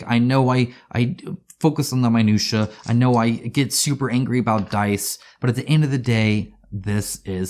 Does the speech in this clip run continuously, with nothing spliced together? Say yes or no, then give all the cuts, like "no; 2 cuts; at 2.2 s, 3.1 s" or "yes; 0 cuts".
yes; 0 cuts